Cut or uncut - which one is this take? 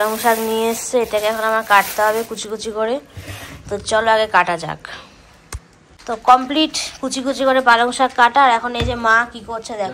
uncut